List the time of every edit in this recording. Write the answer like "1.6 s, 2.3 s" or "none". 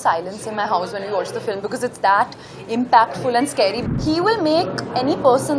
3.8 s